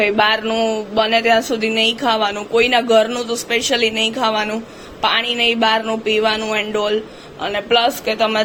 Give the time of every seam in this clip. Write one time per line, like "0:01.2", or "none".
none